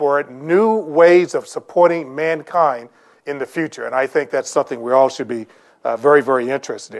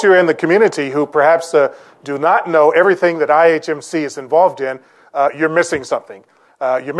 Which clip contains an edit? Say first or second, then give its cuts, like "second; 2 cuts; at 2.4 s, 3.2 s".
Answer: second; 1 cut; at 4.9 s